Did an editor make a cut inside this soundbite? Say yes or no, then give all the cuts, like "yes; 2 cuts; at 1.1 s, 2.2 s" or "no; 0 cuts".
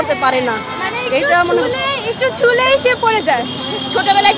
no; 0 cuts